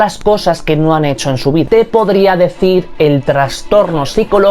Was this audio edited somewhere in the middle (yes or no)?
yes